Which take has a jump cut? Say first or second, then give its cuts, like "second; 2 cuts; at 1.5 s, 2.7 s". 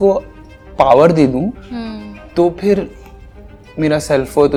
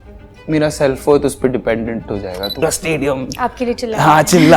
second; 1 cut; at 2.6 s